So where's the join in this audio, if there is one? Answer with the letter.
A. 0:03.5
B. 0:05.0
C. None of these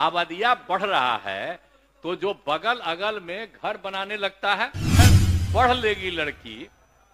B